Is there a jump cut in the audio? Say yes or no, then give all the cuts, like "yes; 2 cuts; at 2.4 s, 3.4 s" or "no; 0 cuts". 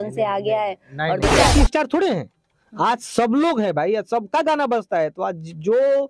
yes; 1 cut; at 1.3 s